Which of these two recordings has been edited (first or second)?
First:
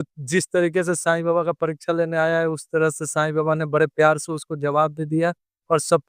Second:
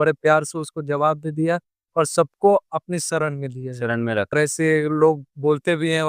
second